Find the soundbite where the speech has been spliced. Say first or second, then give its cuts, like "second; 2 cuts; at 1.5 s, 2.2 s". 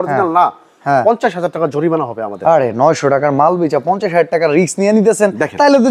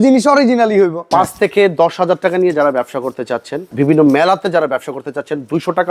second; 2 cuts; at 1.0 s, 3.7 s